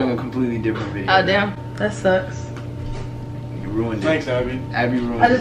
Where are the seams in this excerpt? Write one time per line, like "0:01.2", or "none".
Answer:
none